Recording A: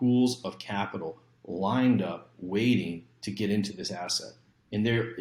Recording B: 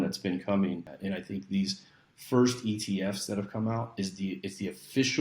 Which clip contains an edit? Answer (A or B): B